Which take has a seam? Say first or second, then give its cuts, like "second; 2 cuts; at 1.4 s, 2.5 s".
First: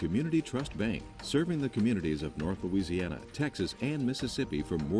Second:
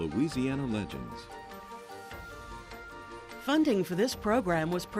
second; 1 cut; at 3.4 s